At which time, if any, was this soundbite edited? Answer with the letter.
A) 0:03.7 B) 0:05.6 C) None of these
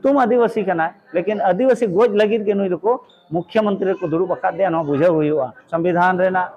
B